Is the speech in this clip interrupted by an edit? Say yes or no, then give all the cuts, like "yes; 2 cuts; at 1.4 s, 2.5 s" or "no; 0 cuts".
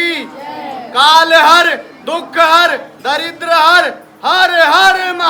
no; 0 cuts